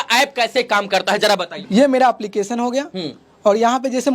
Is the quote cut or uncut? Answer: cut